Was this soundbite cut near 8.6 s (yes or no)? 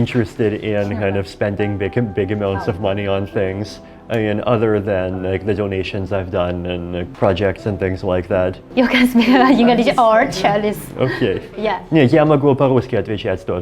yes